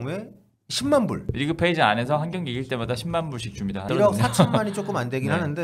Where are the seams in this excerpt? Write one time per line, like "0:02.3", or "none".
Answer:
0:01.3
0:03.9